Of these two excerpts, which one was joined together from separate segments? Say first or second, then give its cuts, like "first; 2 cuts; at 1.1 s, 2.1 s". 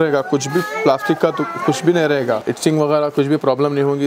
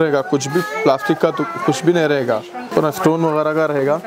first; 1 cut; at 2.5 s